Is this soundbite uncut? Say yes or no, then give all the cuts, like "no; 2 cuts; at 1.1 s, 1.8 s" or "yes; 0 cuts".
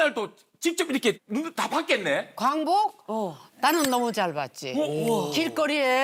yes; 0 cuts